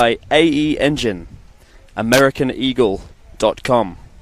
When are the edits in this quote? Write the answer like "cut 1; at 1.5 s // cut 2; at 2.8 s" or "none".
none